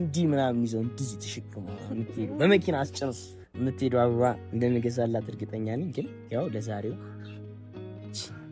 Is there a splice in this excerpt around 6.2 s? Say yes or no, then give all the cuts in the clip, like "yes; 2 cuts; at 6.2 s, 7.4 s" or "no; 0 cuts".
no; 0 cuts